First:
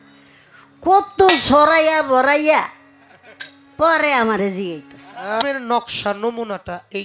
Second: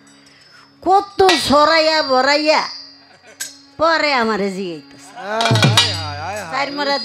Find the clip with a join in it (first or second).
first